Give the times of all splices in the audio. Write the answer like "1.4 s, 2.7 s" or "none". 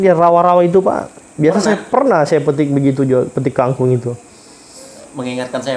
none